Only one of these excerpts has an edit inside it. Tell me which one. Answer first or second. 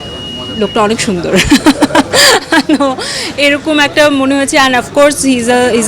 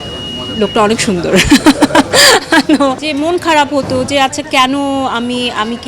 second